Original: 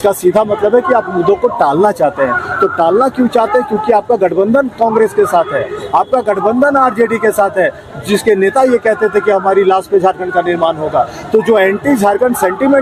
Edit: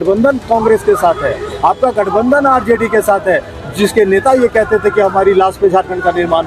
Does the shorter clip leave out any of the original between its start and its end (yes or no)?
no